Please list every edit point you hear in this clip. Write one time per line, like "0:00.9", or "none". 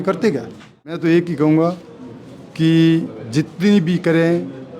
0:01.0